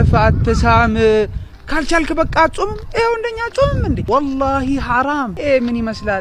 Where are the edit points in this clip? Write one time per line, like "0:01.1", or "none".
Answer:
0:04.0
0:05.3